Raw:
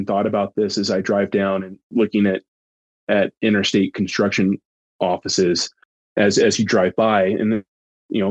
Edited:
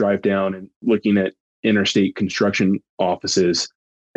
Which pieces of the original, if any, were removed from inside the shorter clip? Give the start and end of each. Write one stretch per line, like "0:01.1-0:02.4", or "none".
0:02.6-0:03.3
0:04.7-0:04.9